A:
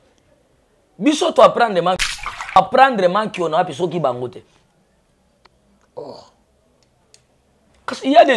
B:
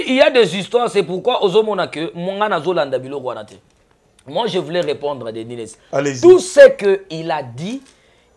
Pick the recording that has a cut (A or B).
A